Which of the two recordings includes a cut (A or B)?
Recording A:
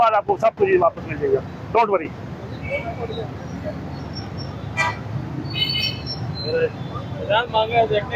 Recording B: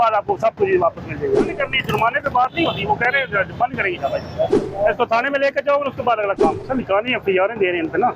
B